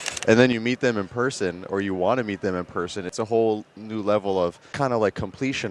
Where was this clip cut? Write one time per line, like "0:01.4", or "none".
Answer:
0:03.1
0:04.7